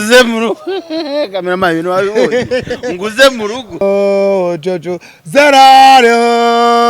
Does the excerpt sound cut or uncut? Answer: cut